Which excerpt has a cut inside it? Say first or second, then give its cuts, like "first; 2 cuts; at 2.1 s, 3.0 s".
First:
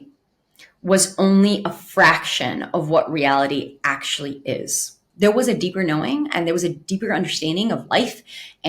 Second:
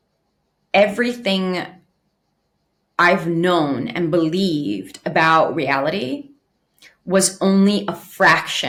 first; 1 cut; at 5.0 s